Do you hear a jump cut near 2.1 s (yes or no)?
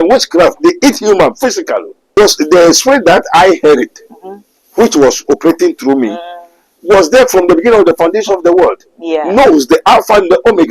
yes